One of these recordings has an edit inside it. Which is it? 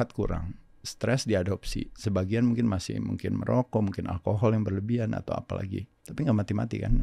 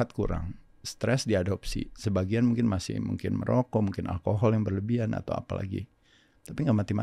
first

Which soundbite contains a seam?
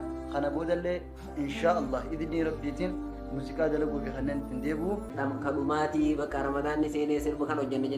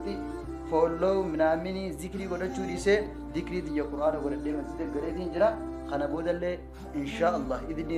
first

